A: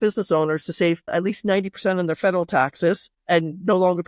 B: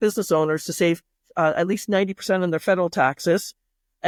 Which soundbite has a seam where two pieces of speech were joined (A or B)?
A